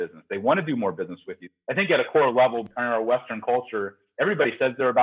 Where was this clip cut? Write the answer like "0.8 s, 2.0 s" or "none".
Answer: 1.5 s, 2.7 s